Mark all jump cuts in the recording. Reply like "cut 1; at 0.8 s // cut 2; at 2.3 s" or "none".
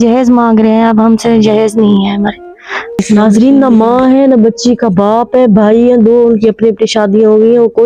cut 1; at 3.0 s